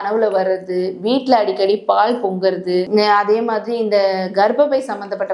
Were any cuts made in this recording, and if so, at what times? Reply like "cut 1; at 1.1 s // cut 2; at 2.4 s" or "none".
none